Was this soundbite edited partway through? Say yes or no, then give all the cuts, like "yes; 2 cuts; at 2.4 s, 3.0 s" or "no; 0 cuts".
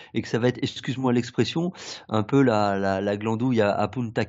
no; 0 cuts